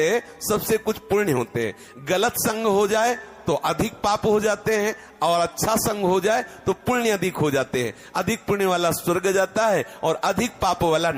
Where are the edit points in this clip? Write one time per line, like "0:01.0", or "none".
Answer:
none